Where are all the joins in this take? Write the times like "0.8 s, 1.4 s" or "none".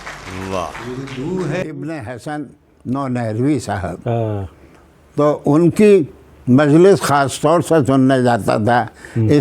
1.6 s